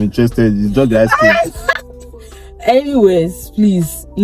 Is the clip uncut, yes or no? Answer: yes